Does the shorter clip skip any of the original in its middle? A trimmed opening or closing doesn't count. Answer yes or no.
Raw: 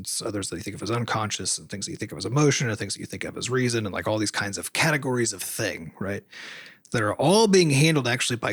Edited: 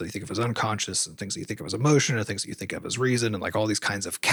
no